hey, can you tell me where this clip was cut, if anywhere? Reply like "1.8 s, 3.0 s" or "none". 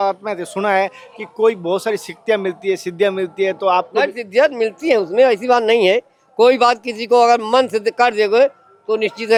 none